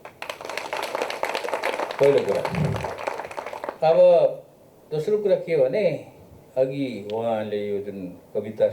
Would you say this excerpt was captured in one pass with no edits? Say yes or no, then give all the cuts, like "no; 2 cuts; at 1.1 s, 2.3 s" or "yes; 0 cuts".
yes; 0 cuts